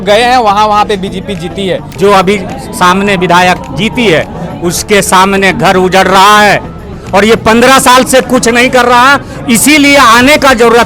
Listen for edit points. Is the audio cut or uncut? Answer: cut